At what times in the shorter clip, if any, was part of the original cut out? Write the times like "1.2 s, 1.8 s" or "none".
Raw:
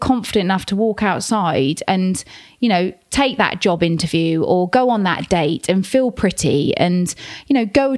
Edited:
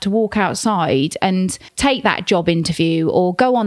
1.7 s